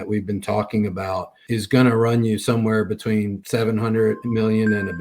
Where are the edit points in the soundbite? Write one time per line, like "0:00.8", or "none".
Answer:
0:01.4
0:03.4
0:04.2